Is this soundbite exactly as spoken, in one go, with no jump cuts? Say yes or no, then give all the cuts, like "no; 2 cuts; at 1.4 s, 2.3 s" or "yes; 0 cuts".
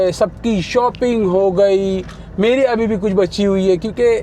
yes; 0 cuts